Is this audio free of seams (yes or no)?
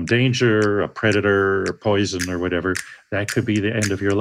yes